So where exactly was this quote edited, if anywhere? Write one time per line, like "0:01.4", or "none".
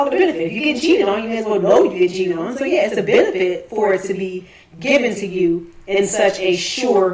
0:03.9

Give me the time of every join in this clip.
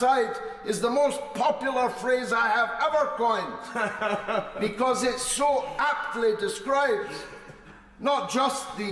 0:03.9

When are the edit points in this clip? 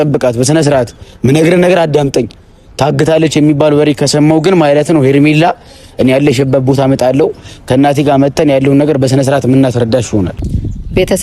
0:10.3

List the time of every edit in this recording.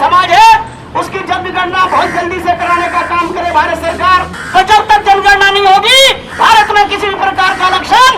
0:04.4

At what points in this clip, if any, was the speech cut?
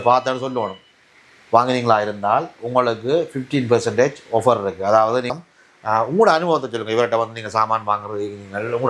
0:05.3

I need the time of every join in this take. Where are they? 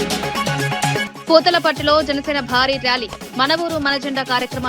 0:01.0

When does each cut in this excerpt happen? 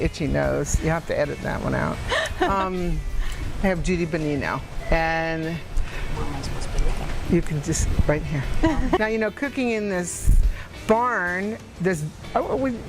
0:09.0

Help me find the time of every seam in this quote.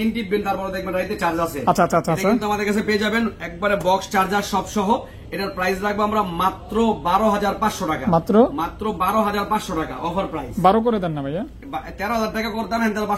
none

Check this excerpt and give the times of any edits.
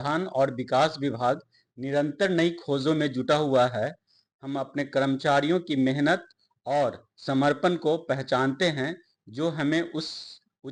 none

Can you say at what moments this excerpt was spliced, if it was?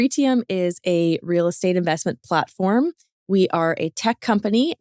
none

